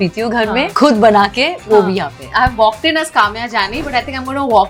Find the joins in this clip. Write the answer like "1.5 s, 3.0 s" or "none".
none